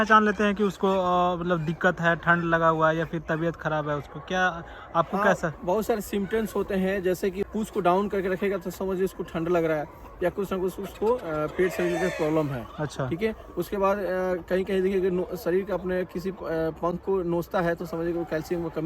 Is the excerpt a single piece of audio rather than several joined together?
yes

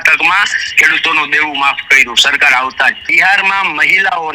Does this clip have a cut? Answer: yes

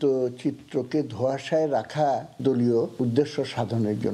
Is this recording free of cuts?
no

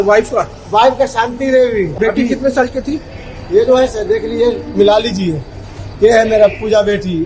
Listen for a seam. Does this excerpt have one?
yes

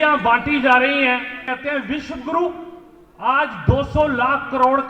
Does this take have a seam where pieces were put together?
yes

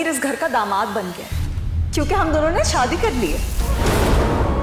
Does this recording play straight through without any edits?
yes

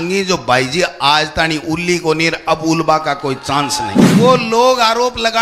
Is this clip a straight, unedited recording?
no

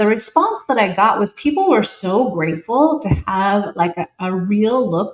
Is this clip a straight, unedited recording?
yes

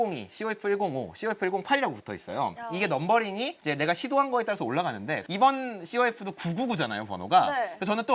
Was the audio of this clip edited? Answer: yes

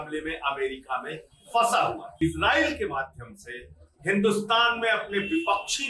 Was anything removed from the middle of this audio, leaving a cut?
yes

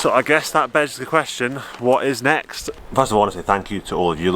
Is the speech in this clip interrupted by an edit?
yes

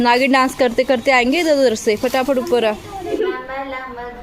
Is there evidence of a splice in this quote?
yes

